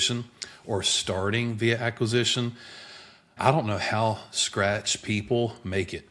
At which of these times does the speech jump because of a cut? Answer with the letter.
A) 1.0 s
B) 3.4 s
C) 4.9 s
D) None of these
B